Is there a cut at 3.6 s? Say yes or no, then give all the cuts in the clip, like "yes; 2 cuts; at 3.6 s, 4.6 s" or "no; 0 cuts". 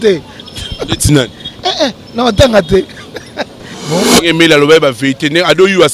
yes; 1 cut; at 3.6 s